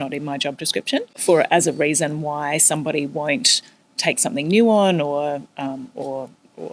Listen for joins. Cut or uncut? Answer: cut